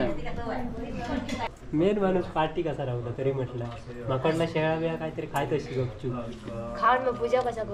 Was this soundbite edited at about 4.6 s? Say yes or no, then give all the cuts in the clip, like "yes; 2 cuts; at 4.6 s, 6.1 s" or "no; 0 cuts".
no; 1 cut; at 1.5 s